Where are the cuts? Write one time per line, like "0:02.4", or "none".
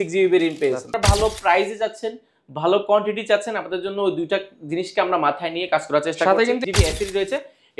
0:00.9
0:06.6